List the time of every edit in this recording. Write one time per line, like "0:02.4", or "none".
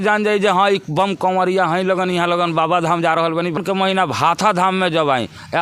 0:03.6